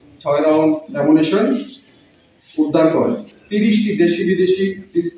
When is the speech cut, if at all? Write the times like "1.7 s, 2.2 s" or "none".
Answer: 3.3 s